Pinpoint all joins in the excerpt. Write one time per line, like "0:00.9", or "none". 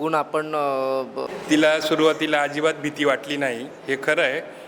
0:01.3